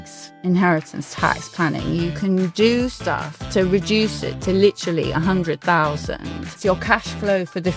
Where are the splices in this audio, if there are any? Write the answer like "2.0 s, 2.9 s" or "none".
6.5 s